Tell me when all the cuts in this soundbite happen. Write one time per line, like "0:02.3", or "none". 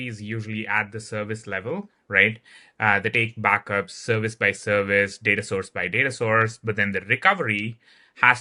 none